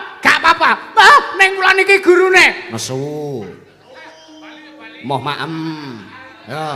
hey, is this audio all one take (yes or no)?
no